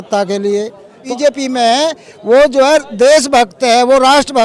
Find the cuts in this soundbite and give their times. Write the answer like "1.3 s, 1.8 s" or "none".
1.1 s